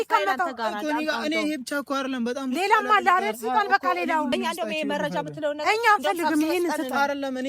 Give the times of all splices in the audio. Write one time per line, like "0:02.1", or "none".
0:04.3

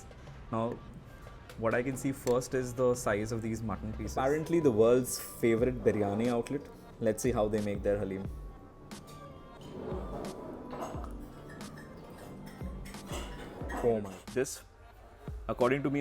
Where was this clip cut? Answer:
0:04.2
0:14.1

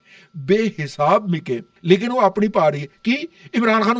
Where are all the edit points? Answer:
0:01.7

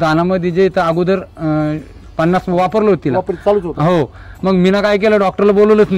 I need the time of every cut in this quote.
0:04.3

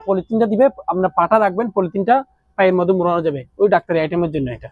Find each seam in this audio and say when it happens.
none

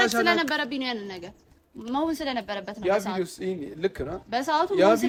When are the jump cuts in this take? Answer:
none

